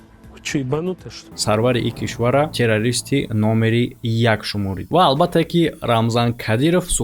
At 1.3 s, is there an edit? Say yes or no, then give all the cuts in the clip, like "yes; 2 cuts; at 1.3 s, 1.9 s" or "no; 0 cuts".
yes; 1 cut; at 1.3 s